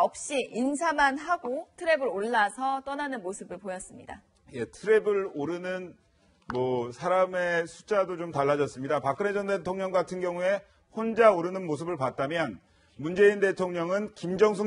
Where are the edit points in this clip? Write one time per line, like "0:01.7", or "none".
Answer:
0:10.5

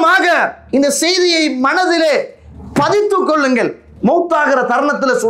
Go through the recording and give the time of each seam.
none

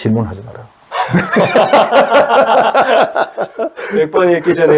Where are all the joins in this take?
none

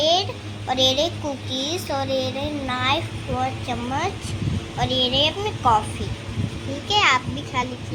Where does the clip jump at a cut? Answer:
none

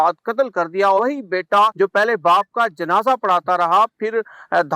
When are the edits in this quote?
0:01.6

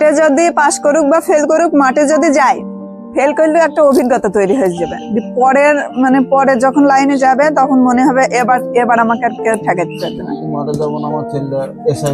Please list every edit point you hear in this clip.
none

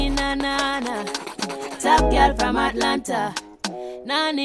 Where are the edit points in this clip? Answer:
none

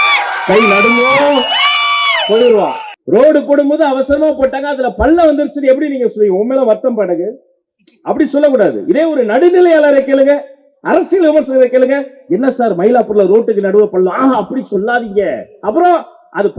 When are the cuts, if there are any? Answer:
0:02.9

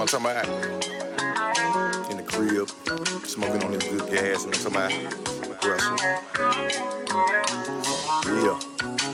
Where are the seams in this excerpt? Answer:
none

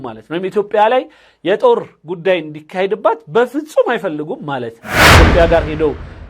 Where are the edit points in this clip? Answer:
0:05.0

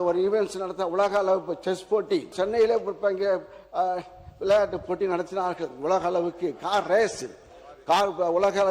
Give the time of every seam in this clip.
0:02.3

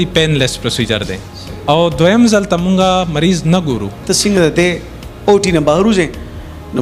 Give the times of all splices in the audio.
0:04.0

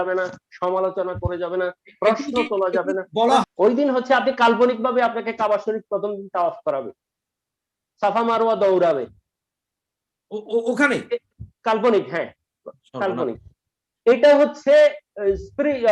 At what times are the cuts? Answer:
0:03.5

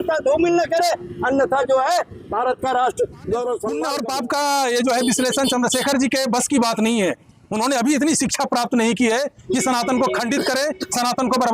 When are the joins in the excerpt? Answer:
0:03.9

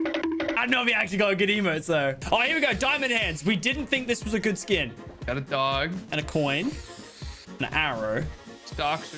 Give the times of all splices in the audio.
0:02.2

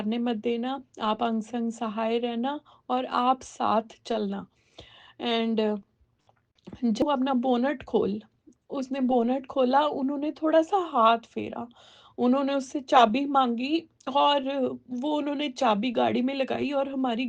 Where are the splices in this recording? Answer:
0:07.0

